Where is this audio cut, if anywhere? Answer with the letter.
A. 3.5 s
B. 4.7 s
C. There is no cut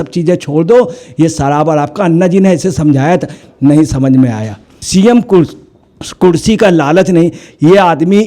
B